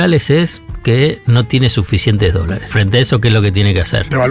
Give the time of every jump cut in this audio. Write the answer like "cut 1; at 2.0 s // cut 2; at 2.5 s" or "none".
cut 1; at 2.7 s